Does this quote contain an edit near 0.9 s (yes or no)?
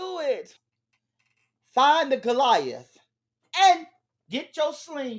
yes